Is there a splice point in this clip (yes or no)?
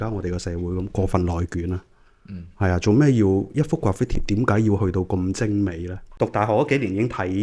yes